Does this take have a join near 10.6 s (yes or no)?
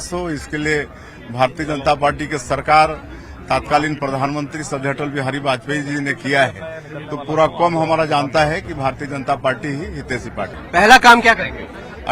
yes